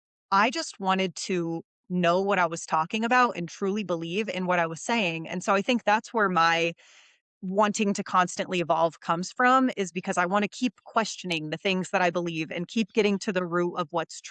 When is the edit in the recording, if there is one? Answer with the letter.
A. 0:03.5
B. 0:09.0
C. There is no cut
C